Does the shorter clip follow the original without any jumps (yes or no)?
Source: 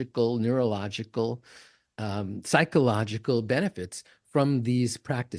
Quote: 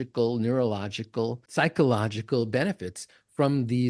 no